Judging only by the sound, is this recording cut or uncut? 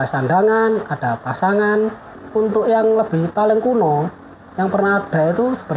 cut